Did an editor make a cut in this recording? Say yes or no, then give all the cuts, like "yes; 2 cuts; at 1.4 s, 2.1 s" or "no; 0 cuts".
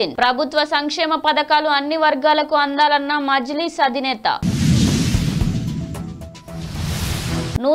no; 0 cuts